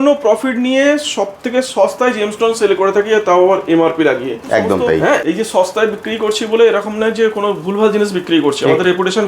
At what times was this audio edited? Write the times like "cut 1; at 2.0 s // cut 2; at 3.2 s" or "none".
cut 1; at 5.2 s